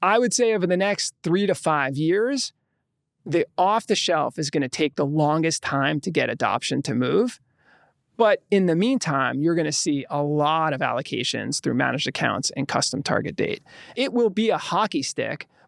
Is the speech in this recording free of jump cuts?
no; 1 cut; at 13.9 s

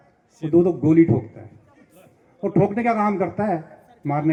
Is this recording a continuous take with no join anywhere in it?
yes; 0 cuts

